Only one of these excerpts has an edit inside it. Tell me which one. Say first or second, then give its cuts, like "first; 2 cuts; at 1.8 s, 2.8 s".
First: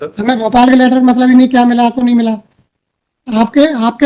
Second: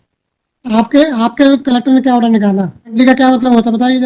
second; 1 cut; at 2.9 s